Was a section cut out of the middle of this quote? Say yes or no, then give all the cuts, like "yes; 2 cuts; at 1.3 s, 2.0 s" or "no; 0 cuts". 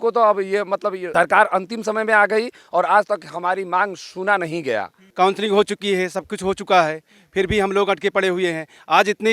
yes; 2 cuts; at 1.0 s, 5.0 s